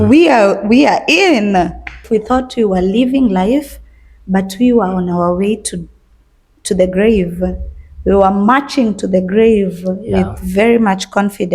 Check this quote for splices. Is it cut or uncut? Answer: cut